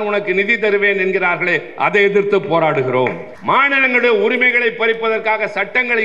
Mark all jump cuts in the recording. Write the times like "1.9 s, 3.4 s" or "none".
3.3 s